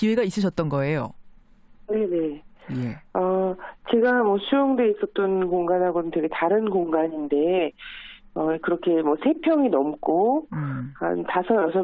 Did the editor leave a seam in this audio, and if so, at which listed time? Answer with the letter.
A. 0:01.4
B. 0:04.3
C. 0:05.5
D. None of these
B